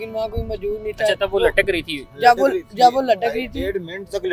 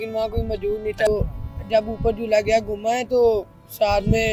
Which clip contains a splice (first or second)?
second